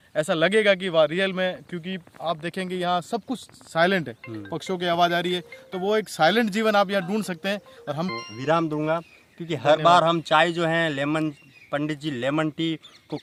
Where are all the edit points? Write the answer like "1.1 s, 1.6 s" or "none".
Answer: none